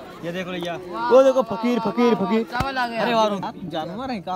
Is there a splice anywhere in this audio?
yes; 1 cut; at 3.4 s

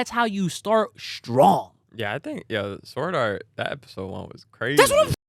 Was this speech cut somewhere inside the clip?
no; 0 cuts

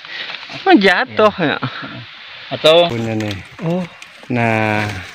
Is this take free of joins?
no; 1 cut; at 2.9 s

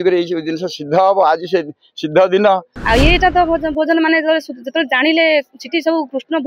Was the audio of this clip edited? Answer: yes; 1 cut; at 2.7 s

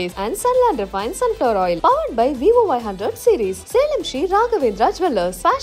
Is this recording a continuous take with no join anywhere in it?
yes; 0 cuts

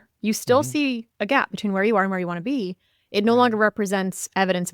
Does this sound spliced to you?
yes; 1 cut; at 1.1 s

